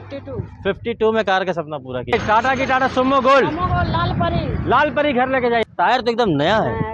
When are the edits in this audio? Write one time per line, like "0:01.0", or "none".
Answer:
0:02.1
0:05.6